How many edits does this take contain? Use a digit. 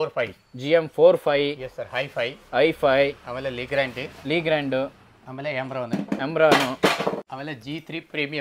1